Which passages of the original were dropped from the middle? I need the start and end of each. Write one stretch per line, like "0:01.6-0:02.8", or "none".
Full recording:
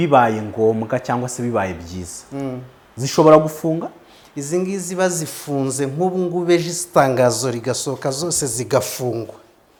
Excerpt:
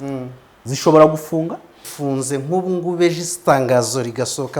0:04.1-0:05.3